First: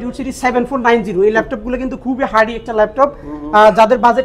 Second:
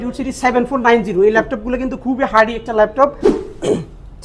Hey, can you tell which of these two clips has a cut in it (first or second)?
second